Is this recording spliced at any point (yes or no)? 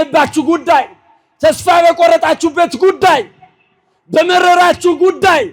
no